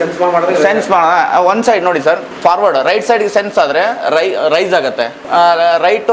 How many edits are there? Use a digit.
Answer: 2